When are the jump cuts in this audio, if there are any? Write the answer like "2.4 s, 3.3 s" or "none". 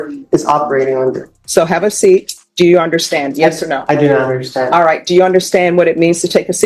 1.3 s, 2.4 s